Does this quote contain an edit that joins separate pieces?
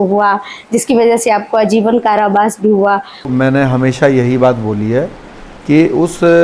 yes; 1 cut; at 3.2 s

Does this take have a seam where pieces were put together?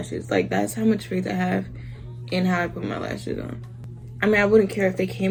no; 0 cuts

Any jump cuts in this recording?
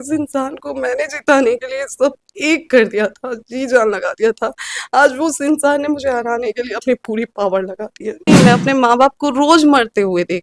yes; 1 cut; at 8.3 s

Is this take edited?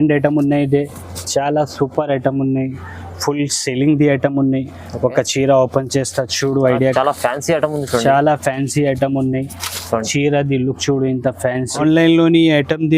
yes; 1 cut; at 11.7 s

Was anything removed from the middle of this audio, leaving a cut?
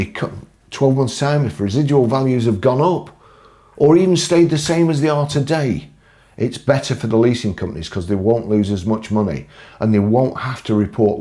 no; 0 cuts

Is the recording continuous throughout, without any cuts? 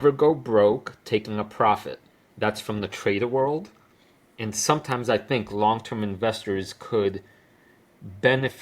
yes; 0 cuts

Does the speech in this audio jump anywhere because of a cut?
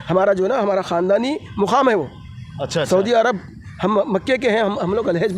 no; 0 cuts

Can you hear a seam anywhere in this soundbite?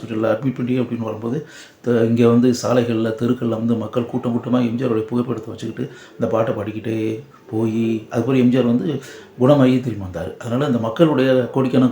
no; 0 cuts

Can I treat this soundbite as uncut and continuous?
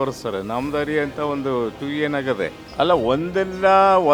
no; 1 cut; at 2.6 s

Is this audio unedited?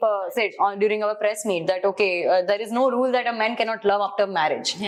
yes; 0 cuts

